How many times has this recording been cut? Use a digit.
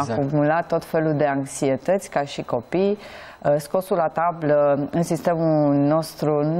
0